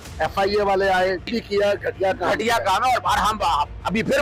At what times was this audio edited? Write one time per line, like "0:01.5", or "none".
0:01.3